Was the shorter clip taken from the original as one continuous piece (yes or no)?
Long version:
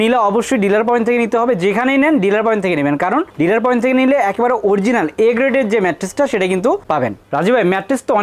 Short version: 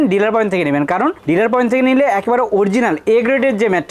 yes